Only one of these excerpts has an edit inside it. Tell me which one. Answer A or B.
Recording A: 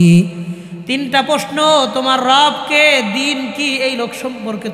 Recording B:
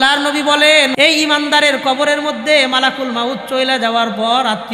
B